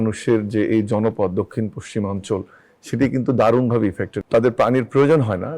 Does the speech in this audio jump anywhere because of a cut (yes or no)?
yes